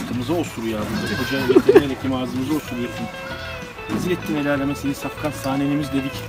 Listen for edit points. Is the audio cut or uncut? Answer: uncut